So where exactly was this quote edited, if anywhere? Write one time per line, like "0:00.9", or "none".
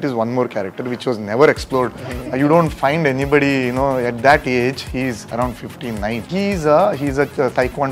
0:06.2